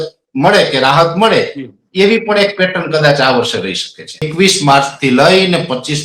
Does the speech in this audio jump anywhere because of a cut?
yes; 1 cut; at 4.3 s

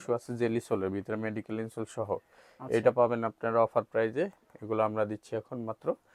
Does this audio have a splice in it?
no; 0 cuts

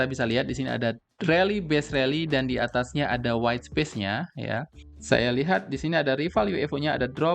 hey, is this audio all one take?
no; 1 cut; at 4.8 s

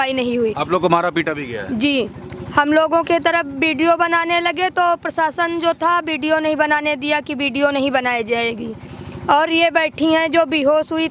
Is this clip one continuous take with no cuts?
yes; 0 cuts

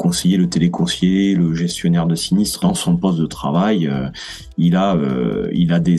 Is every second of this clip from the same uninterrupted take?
no; 1 cut; at 2.6 s

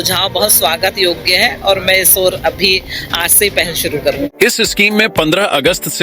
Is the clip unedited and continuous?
no; 1 cut; at 4.3 s

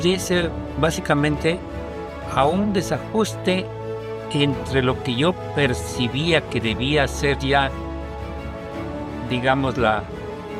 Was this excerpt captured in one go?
yes; 0 cuts

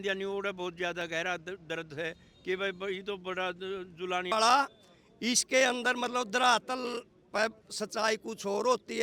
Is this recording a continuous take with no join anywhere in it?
no; 1 cut; at 4.3 s

